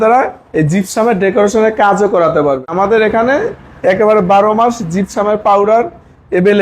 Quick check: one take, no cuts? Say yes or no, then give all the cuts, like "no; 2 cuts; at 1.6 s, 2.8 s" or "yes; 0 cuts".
no; 1 cut; at 2.7 s